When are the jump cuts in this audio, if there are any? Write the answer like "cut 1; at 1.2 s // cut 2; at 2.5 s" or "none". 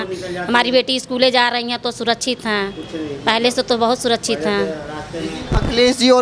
none